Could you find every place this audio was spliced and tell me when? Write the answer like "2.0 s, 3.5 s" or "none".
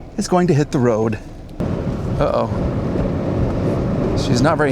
1.6 s